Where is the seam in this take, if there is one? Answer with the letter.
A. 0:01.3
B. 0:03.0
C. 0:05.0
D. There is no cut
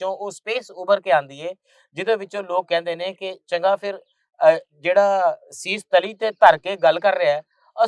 D